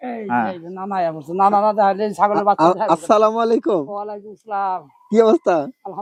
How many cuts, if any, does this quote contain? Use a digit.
0